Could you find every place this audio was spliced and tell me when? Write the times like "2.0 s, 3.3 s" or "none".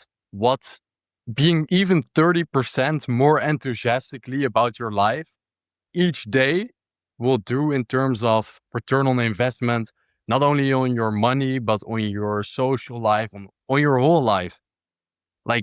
none